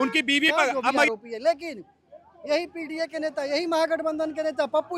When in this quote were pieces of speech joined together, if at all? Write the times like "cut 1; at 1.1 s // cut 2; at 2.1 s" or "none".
cut 1; at 1.1 s

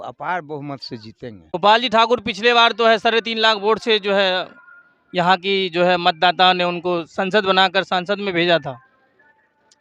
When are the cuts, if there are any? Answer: cut 1; at 1.5 s

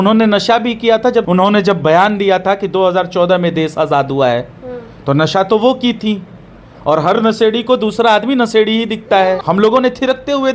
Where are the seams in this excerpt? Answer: cut 1; at 1.3 s // cut 2; at 9.4 s

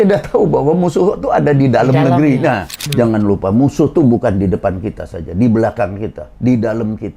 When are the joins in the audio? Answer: cut 1; at 2.8 s

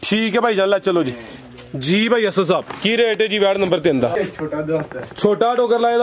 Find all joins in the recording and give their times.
cut 1; at 4.2 s

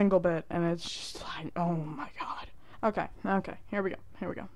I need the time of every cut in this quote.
none

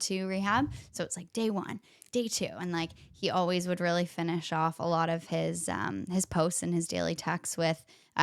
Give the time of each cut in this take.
none

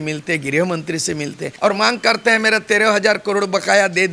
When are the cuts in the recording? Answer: cut 1; at 1.4 s

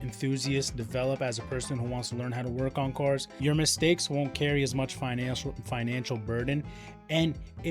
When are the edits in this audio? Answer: cut 1; at 3.3 s

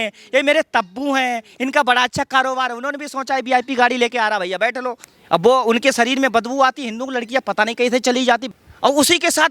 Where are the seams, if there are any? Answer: cut 1; at 5.0 s // cut 2; at 8.5 s

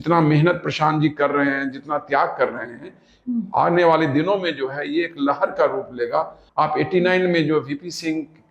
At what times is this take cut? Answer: cut 1; at 6.4 s

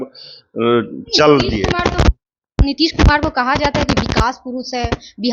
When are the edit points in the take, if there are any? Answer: none

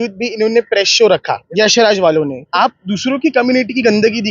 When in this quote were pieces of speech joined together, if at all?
cut 1; at 1.4 s // cut 2; at 2.5 s

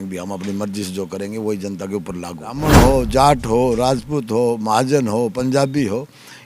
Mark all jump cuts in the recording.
cut 1; at 2.6 s

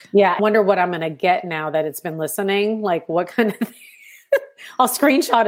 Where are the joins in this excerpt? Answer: none

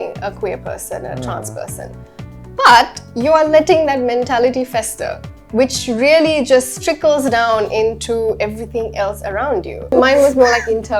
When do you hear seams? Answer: cut 1; at 9.9 s

